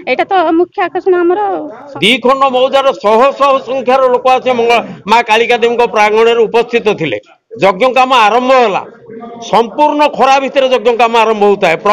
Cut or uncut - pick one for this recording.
cut